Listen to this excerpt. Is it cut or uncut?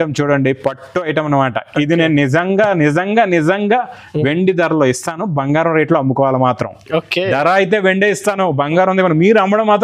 uncut